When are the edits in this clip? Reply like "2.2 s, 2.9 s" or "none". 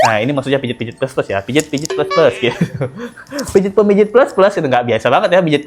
none